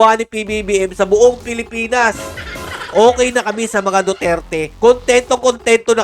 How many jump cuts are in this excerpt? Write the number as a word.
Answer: one